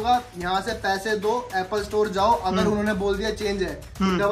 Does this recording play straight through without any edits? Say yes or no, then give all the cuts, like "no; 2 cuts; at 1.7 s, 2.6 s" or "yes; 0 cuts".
yes; 0 cuts